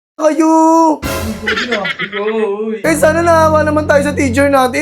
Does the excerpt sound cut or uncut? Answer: cut